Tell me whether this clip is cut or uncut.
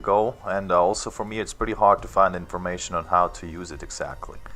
uncut